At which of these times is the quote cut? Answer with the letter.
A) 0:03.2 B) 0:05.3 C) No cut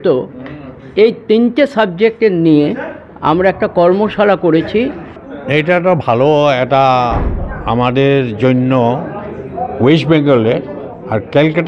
B